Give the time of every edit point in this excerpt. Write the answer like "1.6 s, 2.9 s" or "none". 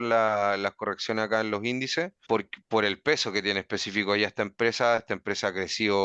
2.2 s